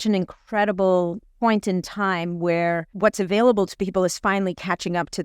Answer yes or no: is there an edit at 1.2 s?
no